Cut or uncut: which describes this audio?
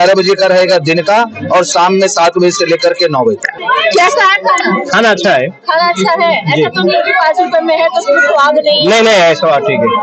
cut